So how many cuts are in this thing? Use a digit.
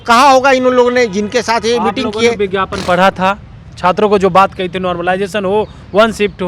0